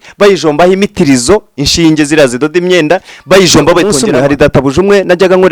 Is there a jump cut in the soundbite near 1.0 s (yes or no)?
no